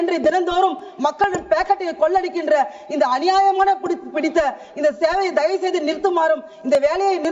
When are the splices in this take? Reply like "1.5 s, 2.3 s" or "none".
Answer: none